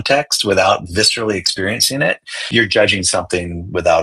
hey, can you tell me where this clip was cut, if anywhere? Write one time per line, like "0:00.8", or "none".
0:02.4